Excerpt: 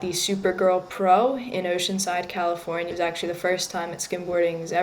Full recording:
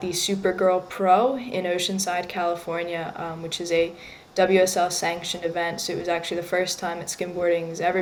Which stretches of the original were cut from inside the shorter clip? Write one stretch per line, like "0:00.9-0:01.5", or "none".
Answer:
0:02.9-0:06.0

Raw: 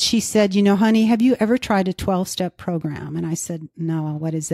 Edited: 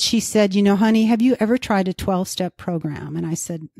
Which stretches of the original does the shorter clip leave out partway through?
none

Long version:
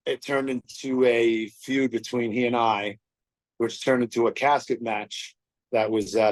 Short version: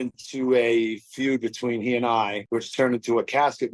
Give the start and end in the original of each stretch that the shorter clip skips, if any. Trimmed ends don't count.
0:02.9-0:03.5

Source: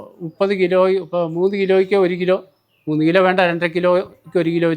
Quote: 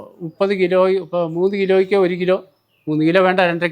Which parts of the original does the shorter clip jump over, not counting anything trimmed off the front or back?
none

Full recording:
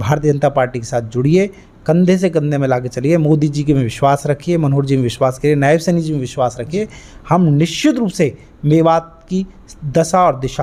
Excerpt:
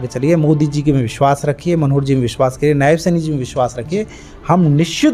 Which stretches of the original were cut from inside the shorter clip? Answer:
none

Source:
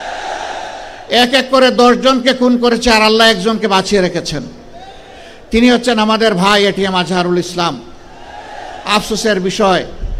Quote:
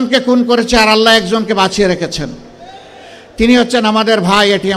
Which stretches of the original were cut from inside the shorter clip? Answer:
none

